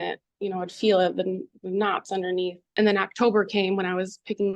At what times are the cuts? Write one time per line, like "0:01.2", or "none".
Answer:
0:02.6